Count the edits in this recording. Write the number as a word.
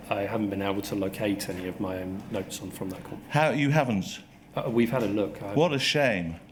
zero